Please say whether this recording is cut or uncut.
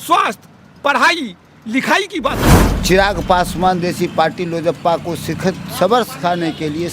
cut